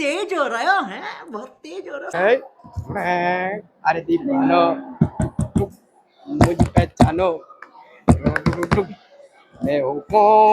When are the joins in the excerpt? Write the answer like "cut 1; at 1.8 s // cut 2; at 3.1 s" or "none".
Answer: cut 1; at 2.1 s